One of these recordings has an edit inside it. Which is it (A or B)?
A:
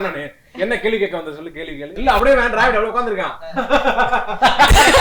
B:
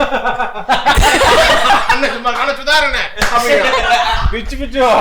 A